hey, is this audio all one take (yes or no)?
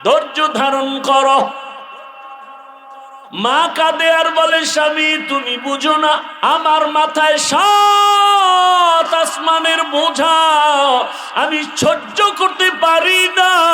no